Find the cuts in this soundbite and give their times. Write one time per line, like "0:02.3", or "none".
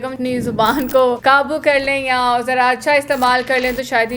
0:01.2